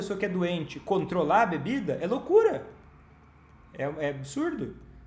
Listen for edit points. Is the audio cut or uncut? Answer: uncut